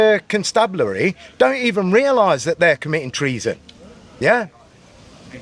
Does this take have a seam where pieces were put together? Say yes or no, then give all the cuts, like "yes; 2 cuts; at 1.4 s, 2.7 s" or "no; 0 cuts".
no; 0 cuts